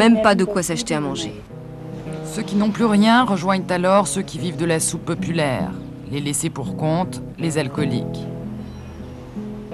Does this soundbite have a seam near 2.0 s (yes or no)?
yes